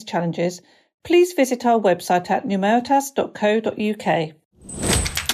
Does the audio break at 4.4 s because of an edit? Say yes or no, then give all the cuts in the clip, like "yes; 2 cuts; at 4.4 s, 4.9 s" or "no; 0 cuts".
yes; 1 cut; at 4.4 s